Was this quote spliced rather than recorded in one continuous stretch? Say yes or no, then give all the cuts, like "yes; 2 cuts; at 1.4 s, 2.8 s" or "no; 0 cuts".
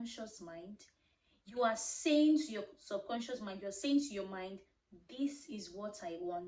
no; 0 cuts